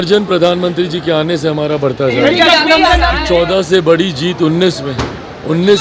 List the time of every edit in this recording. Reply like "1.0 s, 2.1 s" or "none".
3.2 s